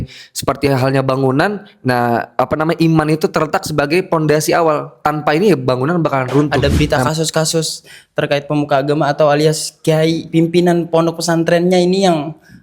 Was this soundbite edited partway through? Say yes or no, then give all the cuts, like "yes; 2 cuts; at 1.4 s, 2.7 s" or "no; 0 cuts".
yes; 1 cut; at 6.5 s